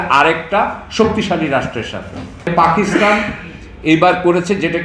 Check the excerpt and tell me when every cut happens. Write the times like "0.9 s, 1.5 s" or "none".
2.5 s